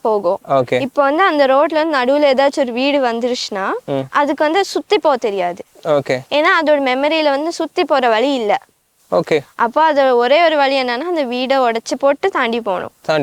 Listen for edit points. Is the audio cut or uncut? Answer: uncut